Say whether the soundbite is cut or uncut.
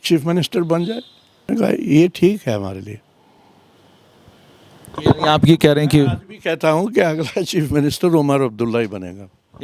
cut